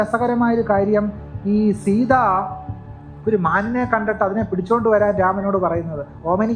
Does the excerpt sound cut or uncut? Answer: uncut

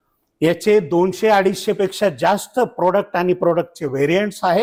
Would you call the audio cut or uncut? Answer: uncut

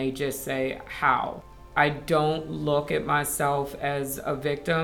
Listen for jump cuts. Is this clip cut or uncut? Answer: cut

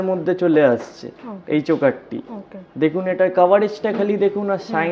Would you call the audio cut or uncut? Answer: uncut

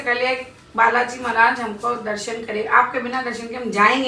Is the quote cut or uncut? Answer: uncut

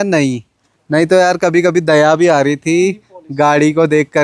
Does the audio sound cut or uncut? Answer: uncut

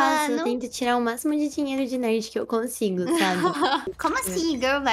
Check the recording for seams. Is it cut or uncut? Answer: cut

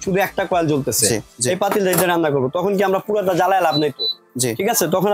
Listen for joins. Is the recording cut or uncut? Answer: cut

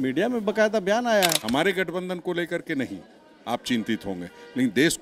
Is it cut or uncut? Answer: cut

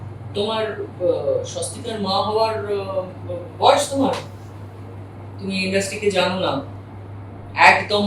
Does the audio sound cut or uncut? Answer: uncut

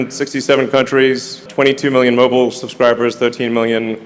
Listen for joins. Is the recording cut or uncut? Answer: uncut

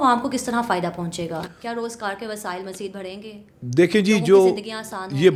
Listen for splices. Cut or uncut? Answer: uncut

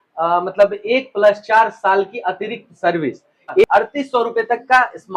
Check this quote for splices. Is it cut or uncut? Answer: cut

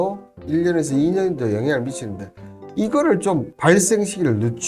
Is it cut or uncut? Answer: cut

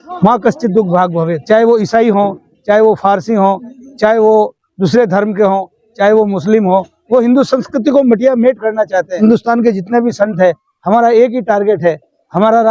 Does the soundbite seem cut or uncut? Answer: cut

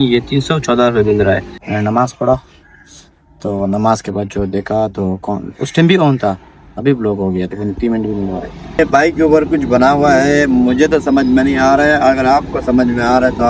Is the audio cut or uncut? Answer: cut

